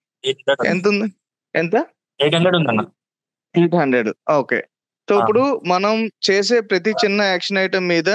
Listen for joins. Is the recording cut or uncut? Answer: uncut